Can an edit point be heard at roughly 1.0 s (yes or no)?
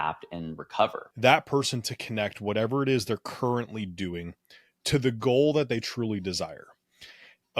yes